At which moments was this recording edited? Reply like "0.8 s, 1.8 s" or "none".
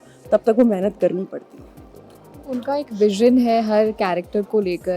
none

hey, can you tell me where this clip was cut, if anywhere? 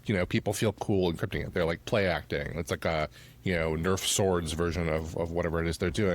none

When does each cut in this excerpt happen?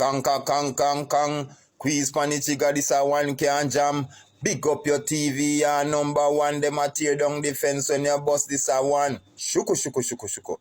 none

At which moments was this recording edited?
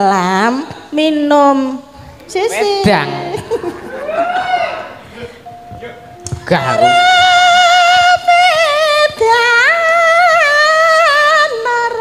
none

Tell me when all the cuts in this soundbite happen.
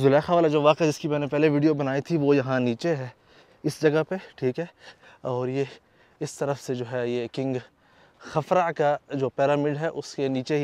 none

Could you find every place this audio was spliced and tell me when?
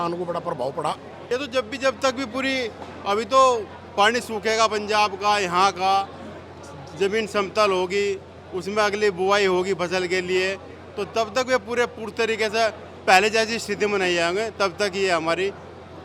1.1 s

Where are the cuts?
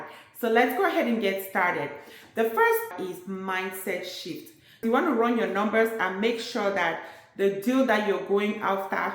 2.9 s, 4.9 s

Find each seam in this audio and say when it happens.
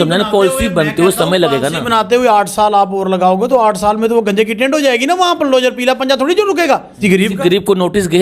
6.9 s

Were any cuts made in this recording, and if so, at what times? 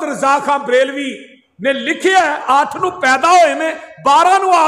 2.4 s

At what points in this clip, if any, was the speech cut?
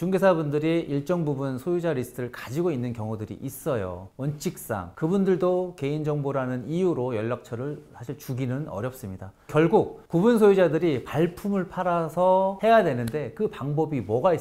4.1 s, 9.5 s

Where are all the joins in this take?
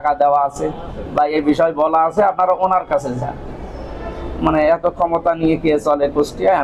none

